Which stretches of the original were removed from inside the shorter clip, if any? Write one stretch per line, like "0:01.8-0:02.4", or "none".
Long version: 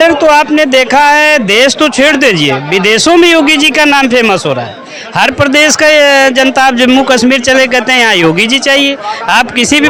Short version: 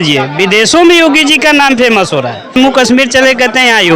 0:04.9-0:06.9